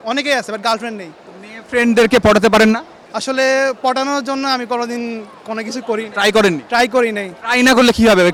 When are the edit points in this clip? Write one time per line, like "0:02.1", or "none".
none